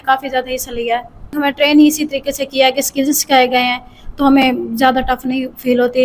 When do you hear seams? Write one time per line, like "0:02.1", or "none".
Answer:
0:01.3